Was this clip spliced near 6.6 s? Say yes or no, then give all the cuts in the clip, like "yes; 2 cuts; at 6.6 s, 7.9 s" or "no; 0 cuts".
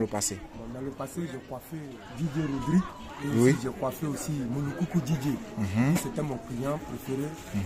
no; 1 cut; at 2.0 s